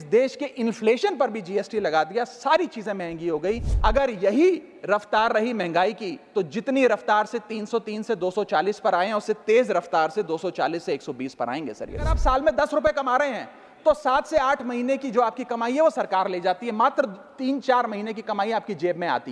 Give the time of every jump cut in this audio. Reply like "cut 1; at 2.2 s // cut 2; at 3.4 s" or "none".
cut 1; at 3.7 s // cut 2; at 12.1 s